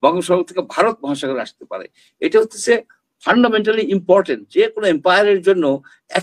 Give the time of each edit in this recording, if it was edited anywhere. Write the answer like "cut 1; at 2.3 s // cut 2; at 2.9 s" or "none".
none